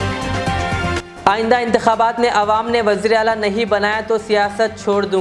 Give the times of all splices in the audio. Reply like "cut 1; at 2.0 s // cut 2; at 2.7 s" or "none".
cut 1; at 1.0 s